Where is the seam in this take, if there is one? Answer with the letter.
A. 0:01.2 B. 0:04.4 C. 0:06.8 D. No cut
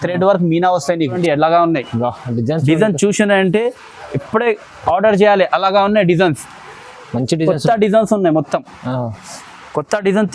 A